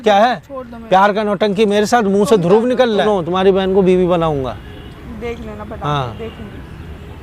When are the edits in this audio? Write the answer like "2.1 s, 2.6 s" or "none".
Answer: 3.1 s